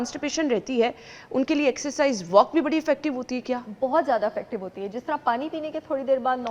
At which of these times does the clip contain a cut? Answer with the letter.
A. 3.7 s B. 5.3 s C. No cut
C